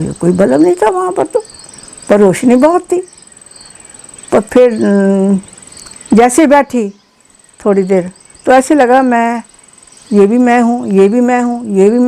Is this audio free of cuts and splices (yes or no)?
yes